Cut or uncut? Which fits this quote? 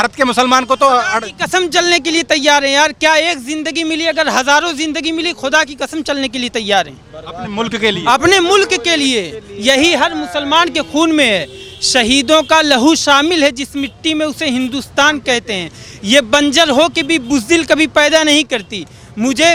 uncut